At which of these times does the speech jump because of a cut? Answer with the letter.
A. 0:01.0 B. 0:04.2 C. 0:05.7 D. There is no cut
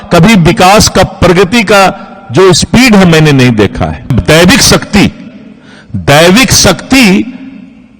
B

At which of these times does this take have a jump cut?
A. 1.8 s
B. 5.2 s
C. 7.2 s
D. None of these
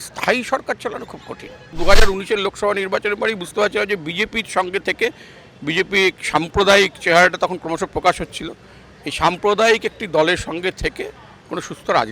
A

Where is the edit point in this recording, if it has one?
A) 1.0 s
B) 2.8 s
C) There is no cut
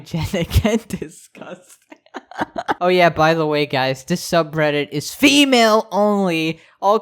B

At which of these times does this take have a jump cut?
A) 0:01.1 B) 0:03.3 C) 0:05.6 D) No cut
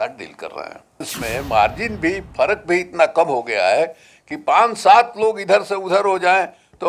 A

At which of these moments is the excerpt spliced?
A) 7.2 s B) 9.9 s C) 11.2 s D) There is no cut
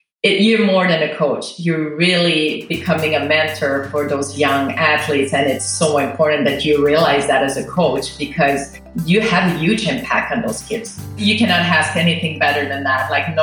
C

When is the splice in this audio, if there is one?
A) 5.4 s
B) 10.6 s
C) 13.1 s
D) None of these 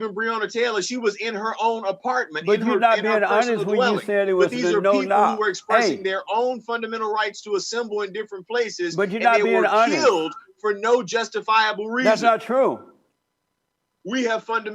D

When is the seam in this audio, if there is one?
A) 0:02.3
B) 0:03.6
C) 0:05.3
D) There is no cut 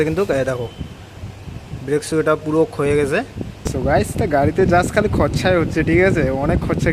B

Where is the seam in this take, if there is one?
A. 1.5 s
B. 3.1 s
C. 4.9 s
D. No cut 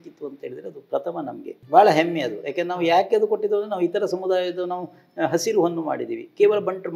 A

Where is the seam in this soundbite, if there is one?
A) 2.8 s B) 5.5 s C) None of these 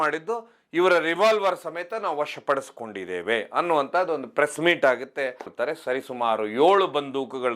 B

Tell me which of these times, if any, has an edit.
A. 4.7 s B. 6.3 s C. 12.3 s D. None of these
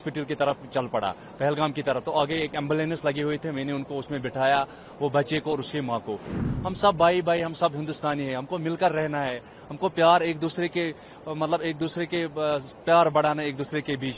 B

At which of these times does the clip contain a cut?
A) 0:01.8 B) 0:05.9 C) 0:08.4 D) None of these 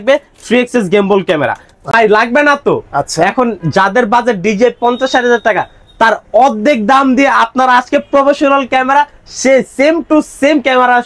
A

